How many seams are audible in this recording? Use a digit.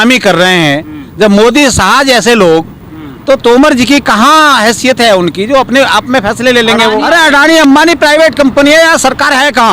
1